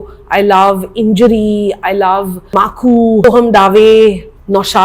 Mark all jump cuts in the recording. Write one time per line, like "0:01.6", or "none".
none

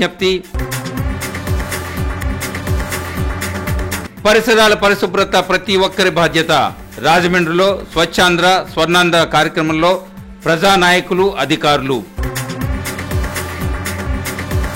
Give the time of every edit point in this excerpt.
none

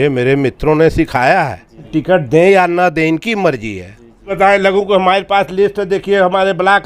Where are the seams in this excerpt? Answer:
0:01.9
0:04.2

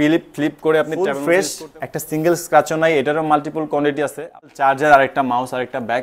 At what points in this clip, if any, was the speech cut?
0:00.9
0:04.4

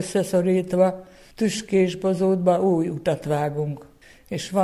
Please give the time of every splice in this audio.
none

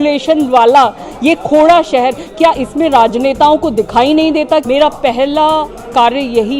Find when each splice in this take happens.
0:04.6

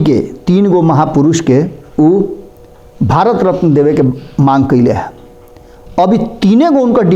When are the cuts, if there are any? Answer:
none

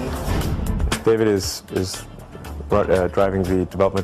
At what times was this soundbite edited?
0:02.9

